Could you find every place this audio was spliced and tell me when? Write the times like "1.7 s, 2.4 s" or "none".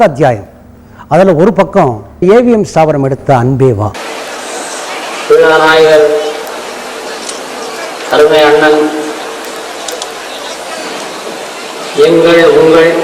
4.0 s